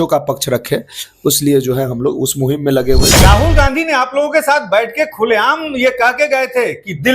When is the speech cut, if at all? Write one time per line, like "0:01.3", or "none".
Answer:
0:03.1